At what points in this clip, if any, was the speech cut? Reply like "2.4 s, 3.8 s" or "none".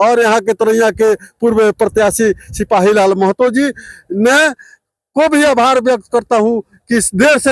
none